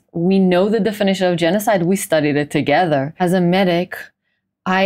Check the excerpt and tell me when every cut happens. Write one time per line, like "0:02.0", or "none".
0:03.1